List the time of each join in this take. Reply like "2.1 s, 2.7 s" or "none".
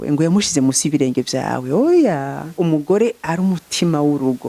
2.6 s

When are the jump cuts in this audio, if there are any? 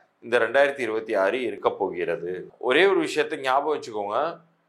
2.5 s

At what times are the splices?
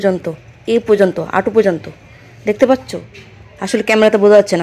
none

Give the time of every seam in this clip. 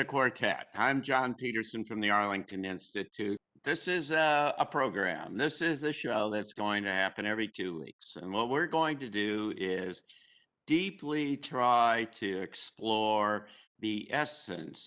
3.4 s

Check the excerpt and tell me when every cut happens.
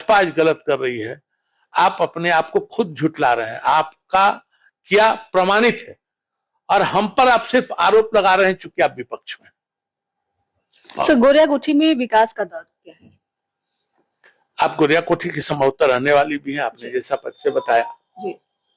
none

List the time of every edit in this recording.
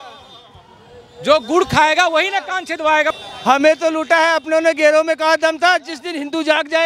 3.1 s

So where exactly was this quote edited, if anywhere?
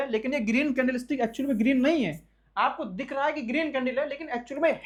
none

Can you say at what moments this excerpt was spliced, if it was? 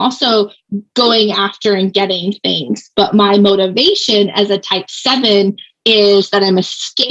none

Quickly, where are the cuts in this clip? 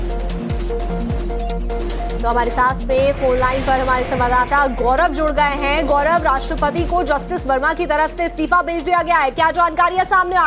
3.0 s

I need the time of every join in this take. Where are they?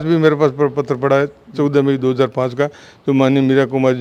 none

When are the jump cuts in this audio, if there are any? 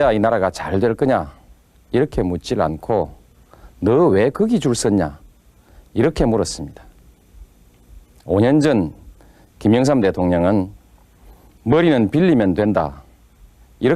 10.3 s

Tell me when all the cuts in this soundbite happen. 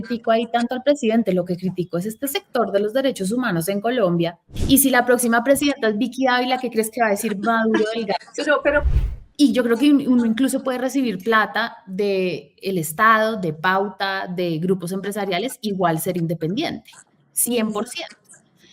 4.5 s, 8.8 s

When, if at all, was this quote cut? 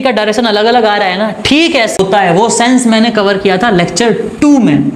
2.0 s

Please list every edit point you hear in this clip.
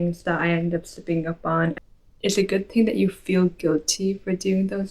1.8 s

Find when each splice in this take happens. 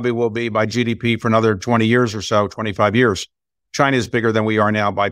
3.6 s

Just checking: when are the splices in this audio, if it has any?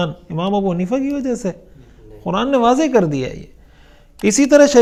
none

